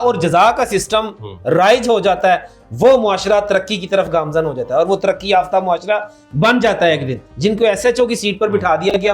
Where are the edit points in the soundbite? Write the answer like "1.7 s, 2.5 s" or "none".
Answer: 7.2 s